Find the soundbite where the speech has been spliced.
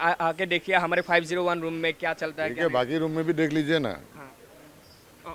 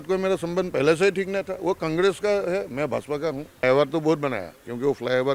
second; 1 cut; at 3.6 s

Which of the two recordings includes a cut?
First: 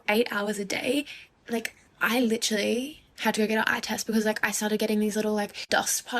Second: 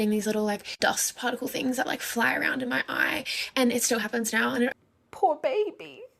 second; 1 cut; at 4.7 s

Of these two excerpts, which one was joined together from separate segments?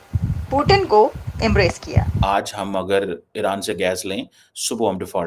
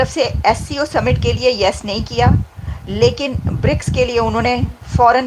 first; 1 cut; at 2.1 s

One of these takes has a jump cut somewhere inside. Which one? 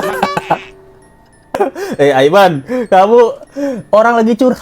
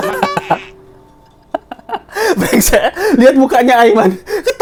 first; 1 cut; at 1.6 s

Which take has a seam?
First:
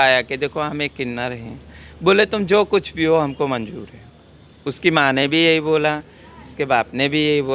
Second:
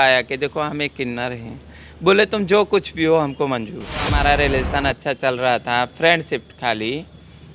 second; 1 cut; at 4.1 s

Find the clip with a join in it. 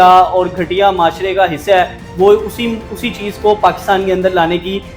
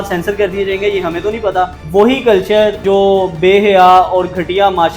second; 2 cuts; at 1.8 s, 2.8 s

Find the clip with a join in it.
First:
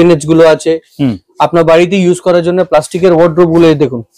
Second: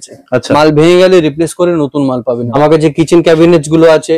second; 1 cut; at 2.5 s

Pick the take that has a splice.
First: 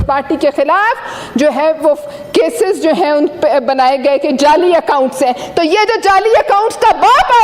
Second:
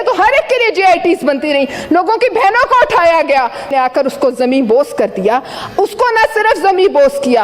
second; 1 cut; at 3.7 s

